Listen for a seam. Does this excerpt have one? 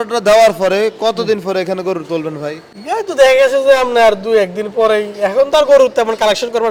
no; 0 cuts

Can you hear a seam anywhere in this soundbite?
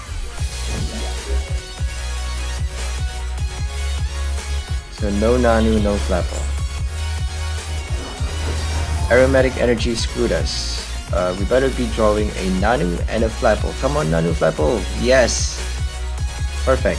no; 0 cuts

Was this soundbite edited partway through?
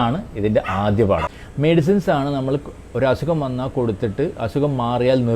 yes; 1 cut; at 1.4 s

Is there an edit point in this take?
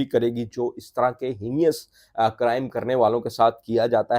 no; 0 cuts

